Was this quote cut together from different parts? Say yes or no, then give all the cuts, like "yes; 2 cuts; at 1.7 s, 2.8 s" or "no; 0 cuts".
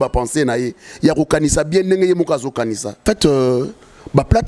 yes; 1 cut; at 3.0 s